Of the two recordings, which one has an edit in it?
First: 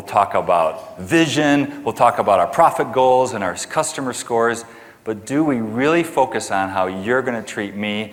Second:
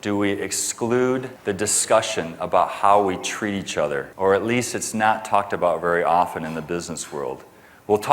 second; 2 cuts; at 1.3 s, 4.1 s

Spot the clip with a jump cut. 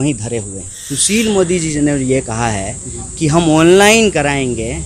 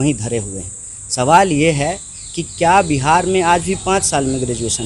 first; 1 cut; at 1.0 s

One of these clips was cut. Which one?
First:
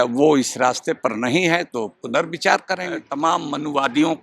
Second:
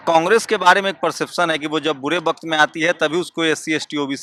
first; 1 cut; at 3.0 s

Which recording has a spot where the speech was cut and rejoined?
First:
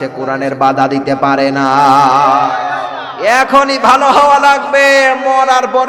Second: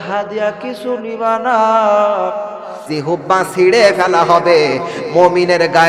second; 1 cut; at 2.9 s

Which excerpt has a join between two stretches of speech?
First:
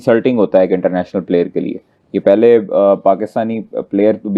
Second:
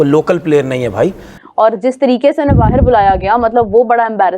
second; 1 cut; at 1.4 s

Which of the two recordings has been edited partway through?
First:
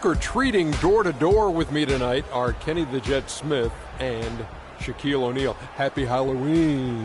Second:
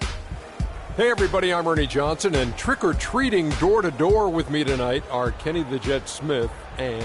second; 1 cut; at 1.0 s

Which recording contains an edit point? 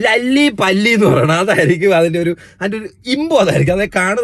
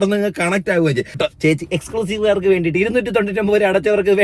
second; 1 cut; at 1.2 s

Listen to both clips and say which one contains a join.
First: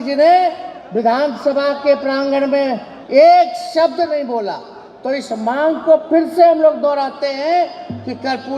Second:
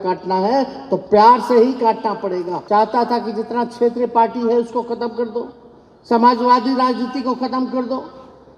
second; 1 cut; at 2.6 s

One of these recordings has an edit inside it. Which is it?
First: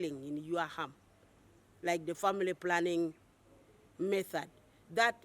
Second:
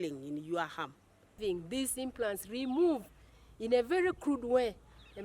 second; 1 cut; at 1.4 s

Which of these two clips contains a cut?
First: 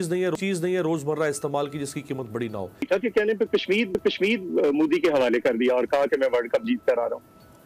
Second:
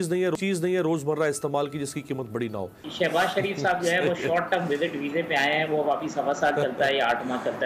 first; 1 cut; at 2.9 s

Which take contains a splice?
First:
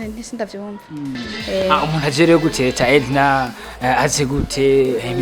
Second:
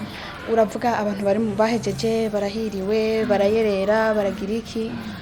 first; 1 cut; at 1.2 s

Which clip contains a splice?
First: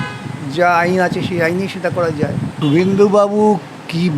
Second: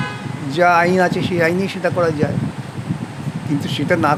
first; 1 cut; at 2.5 s

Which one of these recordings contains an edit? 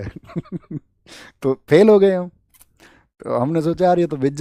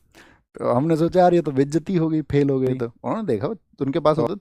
second; 1 cut; at 3.0 s

